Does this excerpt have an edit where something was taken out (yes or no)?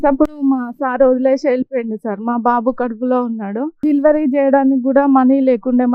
no